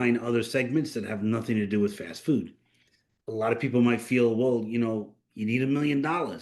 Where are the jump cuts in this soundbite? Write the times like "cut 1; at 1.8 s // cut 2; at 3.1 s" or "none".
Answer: cut 1; at 3.1 s